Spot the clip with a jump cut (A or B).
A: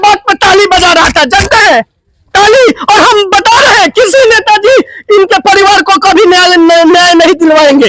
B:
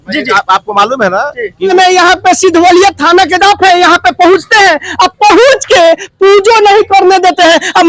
B